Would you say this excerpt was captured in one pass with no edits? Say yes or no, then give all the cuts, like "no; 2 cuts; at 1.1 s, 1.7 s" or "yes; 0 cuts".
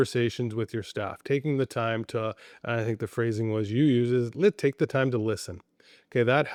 yes; 0 cuts